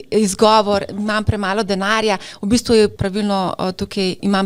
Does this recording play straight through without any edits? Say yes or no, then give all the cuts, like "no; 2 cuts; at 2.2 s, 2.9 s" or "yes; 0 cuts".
yes; 0 cuts